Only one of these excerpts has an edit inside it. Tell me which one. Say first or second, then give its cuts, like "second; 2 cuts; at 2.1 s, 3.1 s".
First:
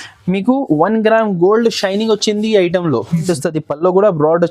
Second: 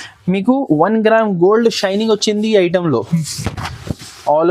first; 1 cut; at 3.2 s